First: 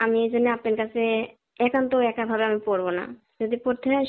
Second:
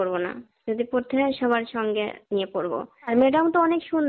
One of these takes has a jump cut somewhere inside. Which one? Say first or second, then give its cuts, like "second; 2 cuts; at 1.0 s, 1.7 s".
second; 1 cut; at 3.1 s